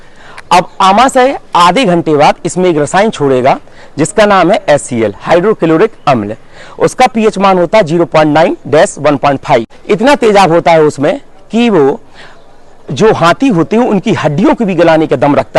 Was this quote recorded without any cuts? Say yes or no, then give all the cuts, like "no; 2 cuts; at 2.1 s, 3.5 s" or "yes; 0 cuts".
yes; 0 cuts